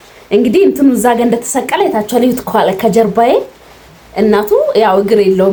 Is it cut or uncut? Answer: uncut